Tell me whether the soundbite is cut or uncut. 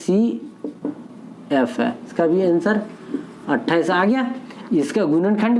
cut